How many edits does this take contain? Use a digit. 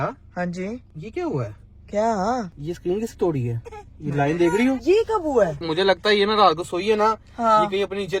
4